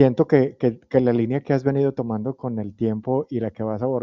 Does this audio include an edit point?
no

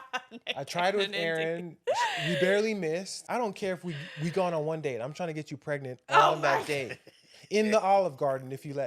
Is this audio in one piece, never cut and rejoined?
no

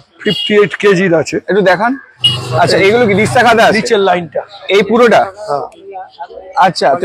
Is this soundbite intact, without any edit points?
yes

